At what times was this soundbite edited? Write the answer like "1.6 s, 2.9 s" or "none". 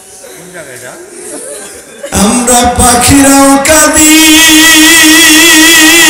2.1 s